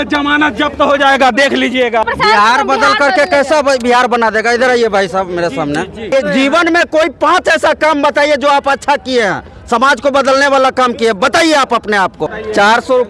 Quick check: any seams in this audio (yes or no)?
yes